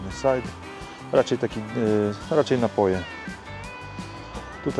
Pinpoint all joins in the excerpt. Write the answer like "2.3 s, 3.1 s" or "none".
none